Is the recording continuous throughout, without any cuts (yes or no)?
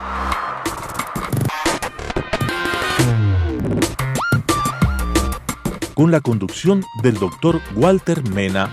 no